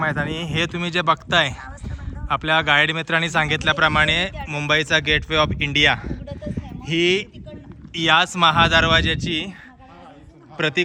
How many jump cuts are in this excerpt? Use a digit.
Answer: 0